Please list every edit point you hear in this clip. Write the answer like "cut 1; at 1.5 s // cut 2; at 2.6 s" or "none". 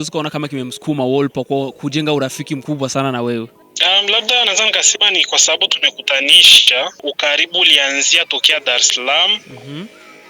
cut 1; at 3.6 s // cut 2; at 7.0 s

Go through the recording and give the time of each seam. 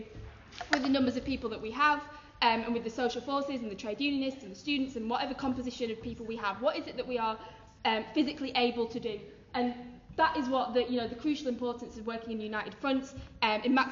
none

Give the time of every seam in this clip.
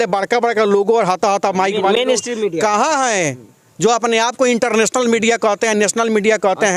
none

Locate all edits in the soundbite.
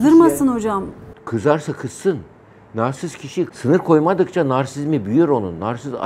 cut 1; at 3.5 s

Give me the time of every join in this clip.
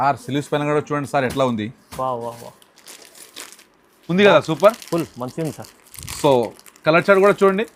none

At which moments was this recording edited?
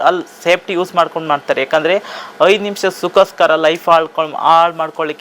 none

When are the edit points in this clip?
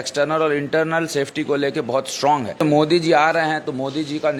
cut 1; at 2.6 s

